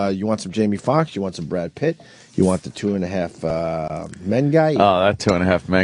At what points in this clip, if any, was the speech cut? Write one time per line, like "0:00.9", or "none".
none